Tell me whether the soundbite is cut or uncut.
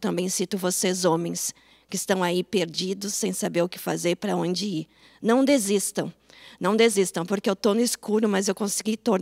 uncut